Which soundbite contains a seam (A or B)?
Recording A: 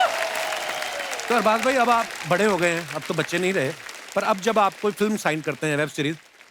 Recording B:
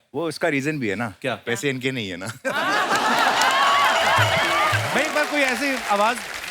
B